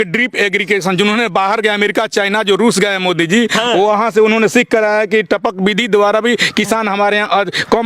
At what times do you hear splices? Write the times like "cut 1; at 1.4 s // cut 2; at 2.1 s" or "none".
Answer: none